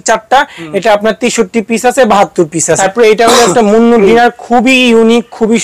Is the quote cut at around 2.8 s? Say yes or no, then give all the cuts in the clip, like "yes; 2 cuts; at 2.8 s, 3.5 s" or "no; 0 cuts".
yes; 1 cut; at 2.8 s